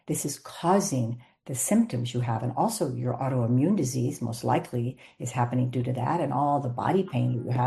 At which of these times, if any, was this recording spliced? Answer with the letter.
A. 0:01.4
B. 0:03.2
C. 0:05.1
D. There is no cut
D